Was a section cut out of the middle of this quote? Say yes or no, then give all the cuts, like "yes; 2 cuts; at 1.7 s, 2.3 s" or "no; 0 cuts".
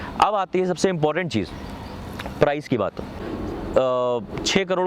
yes; 1 cut; at 3.2 s